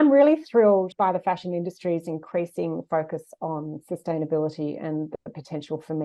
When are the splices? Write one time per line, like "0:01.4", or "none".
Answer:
0:00.9